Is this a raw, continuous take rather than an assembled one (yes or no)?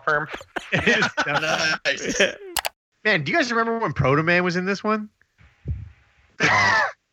no